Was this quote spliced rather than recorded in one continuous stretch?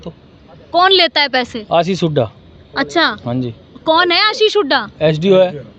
no; 0 cuts

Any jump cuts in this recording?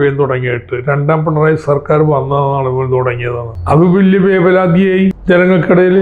yes; 2 cuts; at 3.5 s, 5.2 s

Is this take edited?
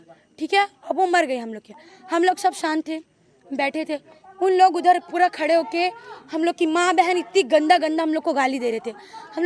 no; 0 cuts

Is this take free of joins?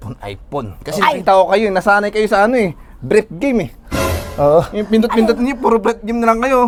yes; 0 cuts

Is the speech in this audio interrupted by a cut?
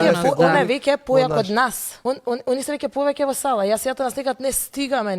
yes; 1 cut; at 1.9 s

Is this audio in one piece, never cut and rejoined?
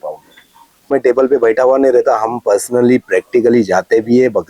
no; 1 cut; at 0.9 s

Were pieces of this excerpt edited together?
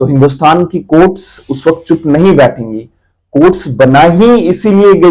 no; 0 cuts

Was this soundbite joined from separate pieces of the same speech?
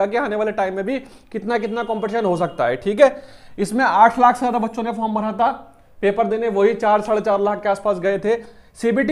no; 0 cuts

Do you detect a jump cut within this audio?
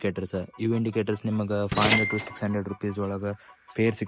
no; 0 cuts

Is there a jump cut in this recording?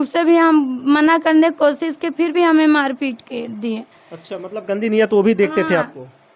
no; 0 cuts

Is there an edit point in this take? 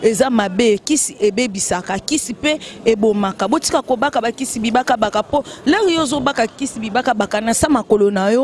no; 0 cuts

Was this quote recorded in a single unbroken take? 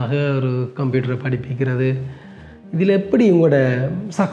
yes; 0 cuts

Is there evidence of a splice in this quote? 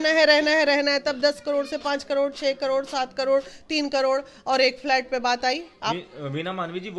no; 0 cuts

